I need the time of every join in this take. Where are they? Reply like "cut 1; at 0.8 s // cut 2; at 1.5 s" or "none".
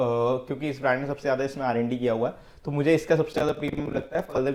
none